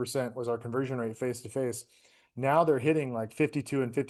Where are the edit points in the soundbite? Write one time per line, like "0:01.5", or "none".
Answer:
none